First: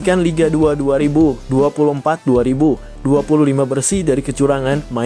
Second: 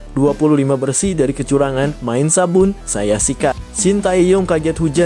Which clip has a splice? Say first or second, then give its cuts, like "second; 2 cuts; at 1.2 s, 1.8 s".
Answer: second; 1 cut; at 3.7 s